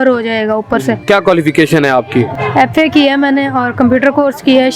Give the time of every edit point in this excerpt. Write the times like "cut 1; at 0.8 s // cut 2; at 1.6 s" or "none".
cut 1; at 1.0 s // cut 2; at 2.4 s

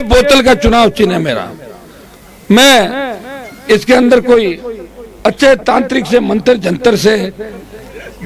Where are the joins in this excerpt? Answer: none

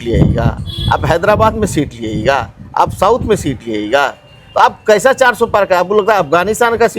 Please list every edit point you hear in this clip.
none

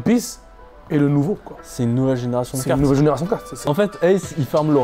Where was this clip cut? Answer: cut 1; at 3.5 s

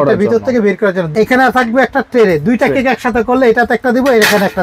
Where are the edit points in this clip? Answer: cut 1; at 1.1 s

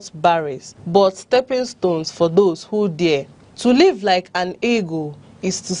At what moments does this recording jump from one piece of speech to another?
none

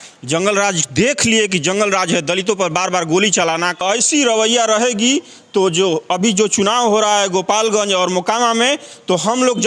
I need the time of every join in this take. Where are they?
cut 1; at 3.8 s

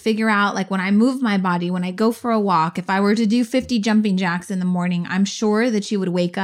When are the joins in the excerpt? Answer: none

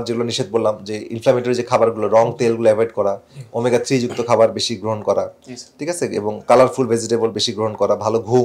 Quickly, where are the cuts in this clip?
none

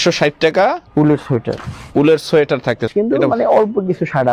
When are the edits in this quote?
cut 1; at 2.9 s

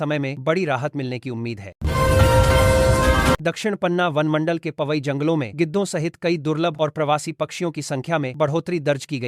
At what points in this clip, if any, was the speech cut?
cut 1; at 1.7 s // cut 2; at 3.5 s

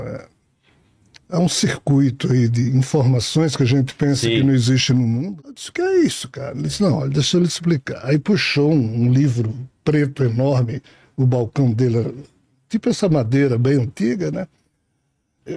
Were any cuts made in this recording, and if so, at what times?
cut 1; at 5.2 s

